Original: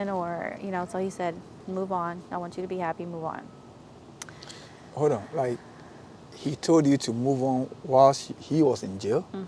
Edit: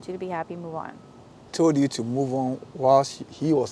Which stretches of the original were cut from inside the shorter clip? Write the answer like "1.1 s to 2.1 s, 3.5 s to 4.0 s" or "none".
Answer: 4.0 s to 6.6 s